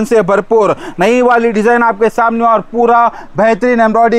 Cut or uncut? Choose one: uncut